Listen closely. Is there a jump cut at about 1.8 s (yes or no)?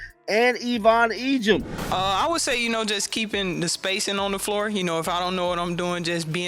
yes